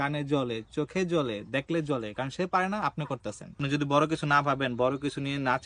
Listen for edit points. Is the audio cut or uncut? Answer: cut